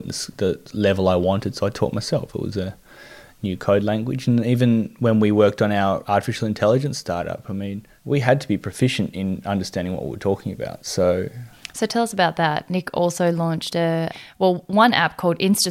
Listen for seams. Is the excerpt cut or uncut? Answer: uncut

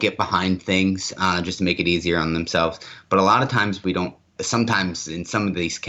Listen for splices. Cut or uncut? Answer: uncut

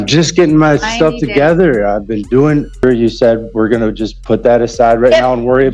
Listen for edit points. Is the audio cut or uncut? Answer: cut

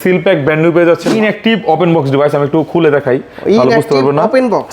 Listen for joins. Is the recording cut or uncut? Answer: cut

